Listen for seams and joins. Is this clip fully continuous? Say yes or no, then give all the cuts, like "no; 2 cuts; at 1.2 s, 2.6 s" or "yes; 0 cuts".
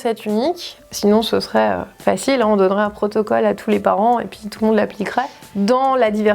no; 1 cut; at 5.4 s